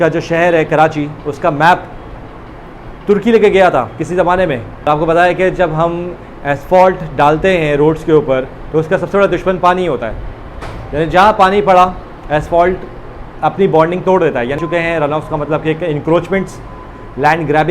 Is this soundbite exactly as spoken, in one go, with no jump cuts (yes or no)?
no